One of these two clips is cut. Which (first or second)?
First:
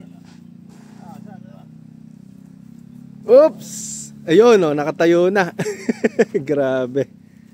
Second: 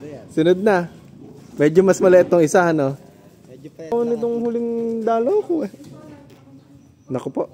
second